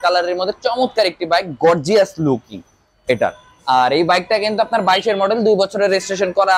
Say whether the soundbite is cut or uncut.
uncut